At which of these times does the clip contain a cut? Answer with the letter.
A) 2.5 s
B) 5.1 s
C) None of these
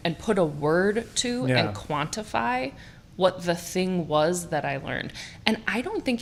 C